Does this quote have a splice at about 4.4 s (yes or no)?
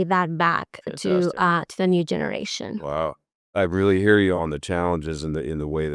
yes